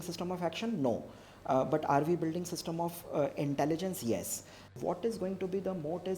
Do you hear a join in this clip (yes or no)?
yes